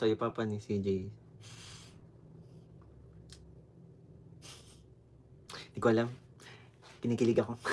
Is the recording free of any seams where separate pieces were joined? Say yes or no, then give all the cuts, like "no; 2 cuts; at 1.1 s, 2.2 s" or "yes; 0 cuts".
yes; 0 cuts